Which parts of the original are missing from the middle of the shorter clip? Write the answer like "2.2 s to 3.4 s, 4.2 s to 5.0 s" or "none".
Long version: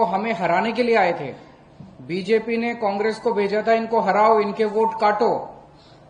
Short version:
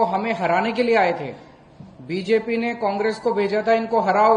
none